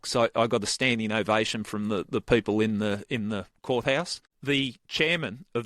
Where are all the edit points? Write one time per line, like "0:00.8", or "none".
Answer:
0:04.2